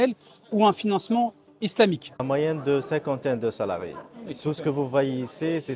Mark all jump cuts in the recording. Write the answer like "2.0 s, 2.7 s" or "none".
2.2 s

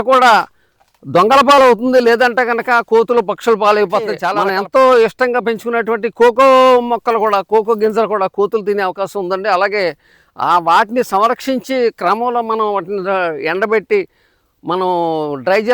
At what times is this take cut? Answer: 4.3 s

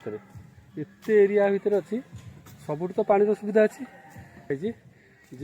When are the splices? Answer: 4.4 s

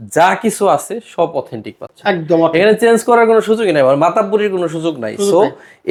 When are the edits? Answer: none

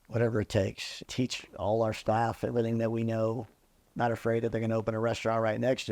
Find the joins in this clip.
1.1 s

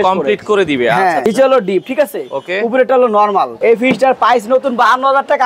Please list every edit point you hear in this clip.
1.2 s, 3.5 s

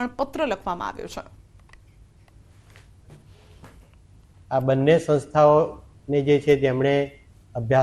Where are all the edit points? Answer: 2.4 s

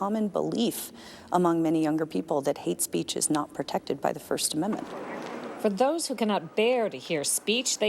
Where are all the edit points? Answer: 4.9 s

